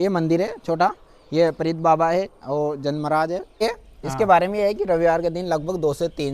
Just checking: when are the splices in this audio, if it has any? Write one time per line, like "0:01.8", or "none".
0:03.5